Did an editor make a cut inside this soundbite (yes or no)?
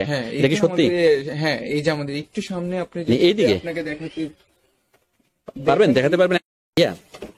yes